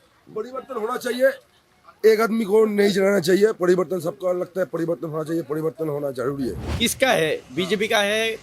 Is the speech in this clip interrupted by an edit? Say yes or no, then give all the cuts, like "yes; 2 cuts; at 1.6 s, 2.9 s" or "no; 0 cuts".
yes; 1 cut; at 6.6 s